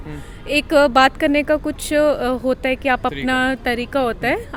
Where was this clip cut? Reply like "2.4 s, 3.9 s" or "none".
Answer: none

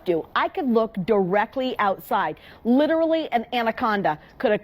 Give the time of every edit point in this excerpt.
2.4 s

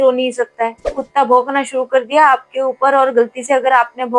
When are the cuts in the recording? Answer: 1.0 s

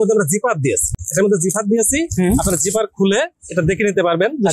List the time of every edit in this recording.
1.0 s

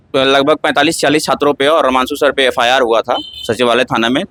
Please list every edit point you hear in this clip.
none

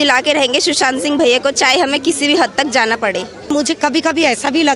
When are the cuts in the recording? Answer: 3.5 s

